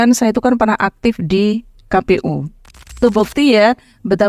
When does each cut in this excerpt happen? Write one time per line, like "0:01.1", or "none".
0:03.0